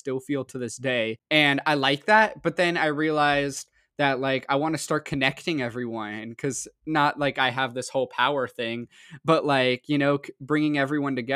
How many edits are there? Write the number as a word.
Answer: one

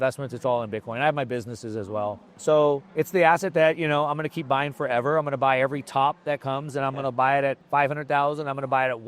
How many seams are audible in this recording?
three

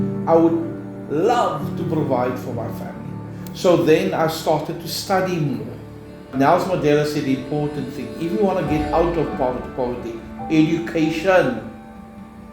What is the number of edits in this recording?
one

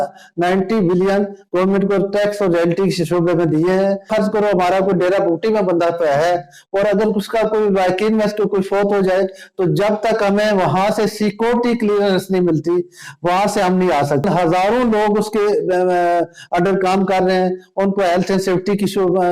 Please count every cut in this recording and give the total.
two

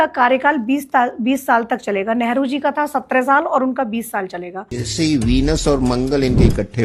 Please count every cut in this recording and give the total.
one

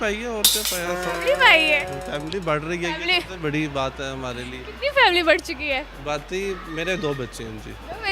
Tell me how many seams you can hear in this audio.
zero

